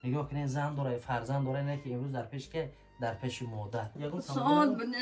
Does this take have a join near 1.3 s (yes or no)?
no